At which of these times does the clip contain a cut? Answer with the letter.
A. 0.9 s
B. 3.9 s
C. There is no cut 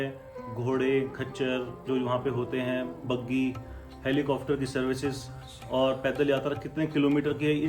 C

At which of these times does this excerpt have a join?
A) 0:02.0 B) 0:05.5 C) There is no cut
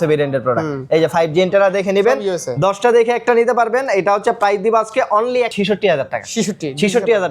B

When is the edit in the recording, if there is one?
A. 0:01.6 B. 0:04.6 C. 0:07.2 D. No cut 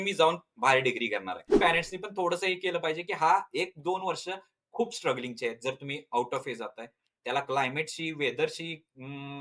A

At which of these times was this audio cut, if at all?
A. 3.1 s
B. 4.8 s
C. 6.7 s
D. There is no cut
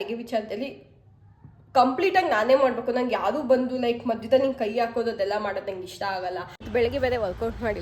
C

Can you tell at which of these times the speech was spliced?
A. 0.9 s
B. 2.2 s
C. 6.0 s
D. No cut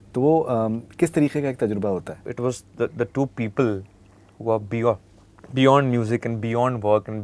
B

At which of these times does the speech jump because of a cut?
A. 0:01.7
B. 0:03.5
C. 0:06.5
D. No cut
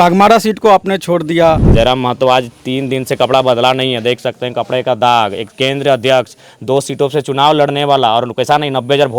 A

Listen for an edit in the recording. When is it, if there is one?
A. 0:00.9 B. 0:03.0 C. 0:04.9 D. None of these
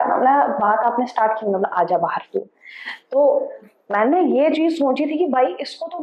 D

